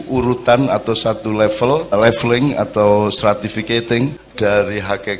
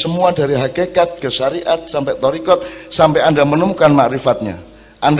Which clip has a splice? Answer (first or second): first